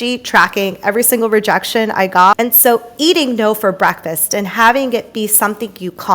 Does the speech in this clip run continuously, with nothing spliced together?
no; 1 cut; at 2.4 s

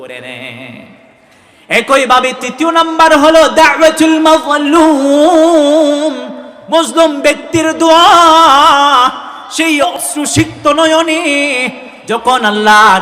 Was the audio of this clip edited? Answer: yes; 1 cut; at 9.9 s

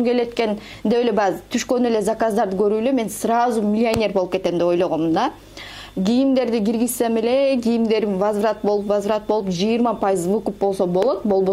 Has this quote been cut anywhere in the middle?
no; 0 cuts

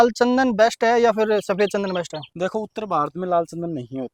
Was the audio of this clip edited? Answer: no; 0 cuts

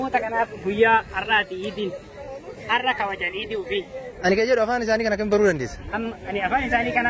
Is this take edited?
yes; 1 cut; at 4.1 s

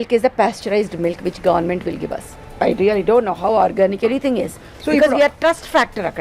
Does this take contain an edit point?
yes; 1 cut; at 2.5 s

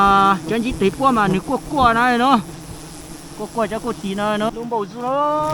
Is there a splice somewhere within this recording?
yes; 1 cut; at 4.5 s

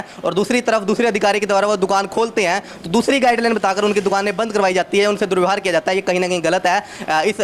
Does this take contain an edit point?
no; 0 cuts

